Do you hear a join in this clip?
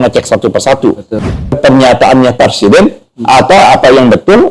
yes; 1 cut; at 1.6 s

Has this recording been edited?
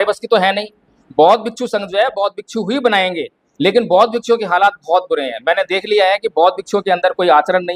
no; 0 cuts

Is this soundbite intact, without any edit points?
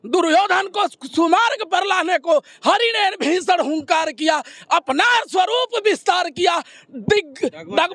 yes; 0 cuts

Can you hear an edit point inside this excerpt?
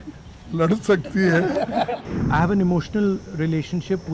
yes; 1 cut; at 2.0 s

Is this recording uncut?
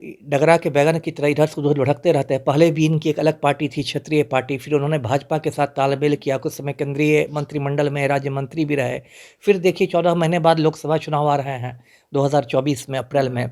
yes; 0 cuts

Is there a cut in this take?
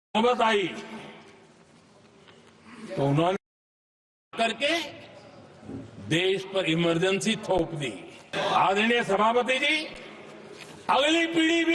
yes; 1 cut; at 8.3 s

